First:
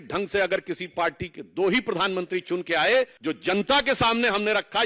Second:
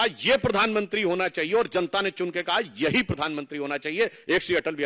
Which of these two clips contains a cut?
first; 1 cut; at 3.2 s

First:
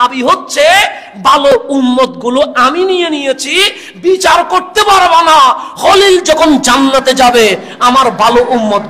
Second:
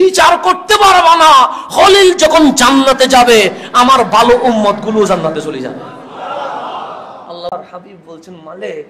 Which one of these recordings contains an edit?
second; 1 cut; at 7.5 s

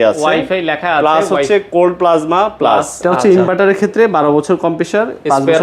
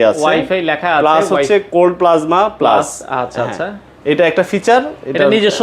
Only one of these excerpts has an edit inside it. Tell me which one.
first; 1 cut; at 3.2 s

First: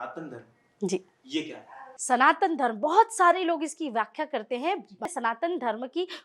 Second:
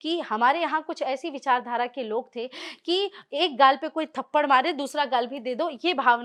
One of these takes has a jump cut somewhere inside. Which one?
first; 1 cut; at 5.1 s

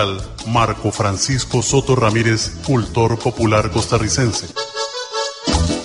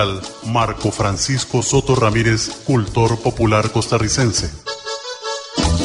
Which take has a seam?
first; 1 cut; at 4.5 s

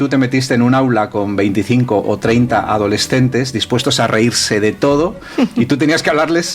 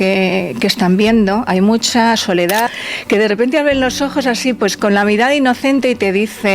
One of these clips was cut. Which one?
second; 2 cuts; at 1.5 s, 2.8 s

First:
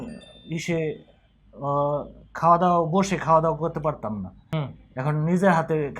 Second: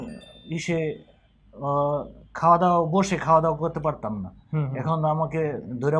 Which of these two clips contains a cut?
first; 1 cut; at 4.4 s

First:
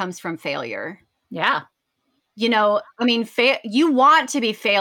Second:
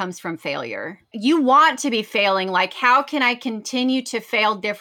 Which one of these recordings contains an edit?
second; 1 cut; at 1.1 s

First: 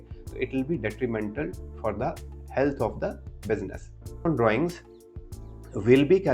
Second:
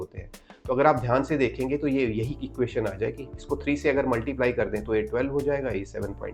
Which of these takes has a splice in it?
first; 1 cut; at 4.2 s

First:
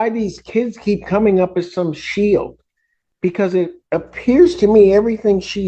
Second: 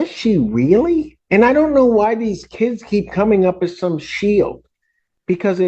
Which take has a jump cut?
second; 1 cut; at 1.2 s

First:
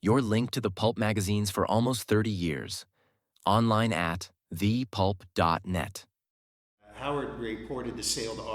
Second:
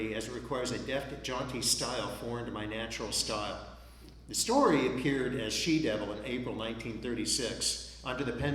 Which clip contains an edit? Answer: first; 1 cut; at 6.8 s

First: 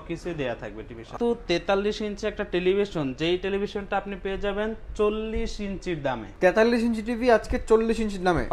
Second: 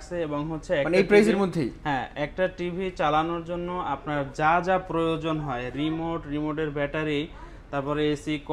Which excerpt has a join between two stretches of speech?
first; 2 cuts; at 1.1 s, 6.3 s

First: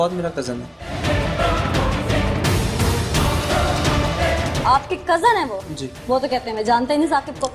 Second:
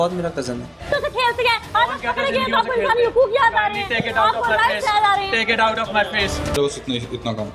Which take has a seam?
second; 2 cuts; at 0.9 s, 6.6 s

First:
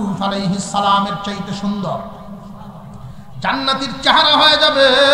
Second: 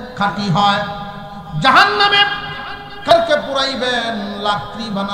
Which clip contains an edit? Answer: second; 1 cut; at 3.1 s

